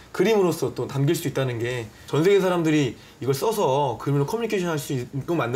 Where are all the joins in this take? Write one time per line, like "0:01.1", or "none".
0:01.9